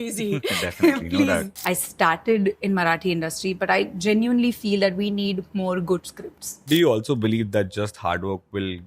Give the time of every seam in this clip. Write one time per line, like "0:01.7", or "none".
0:01.5
0:06.7